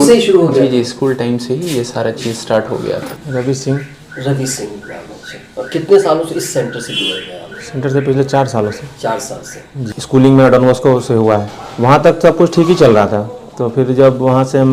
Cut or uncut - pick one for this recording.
uncut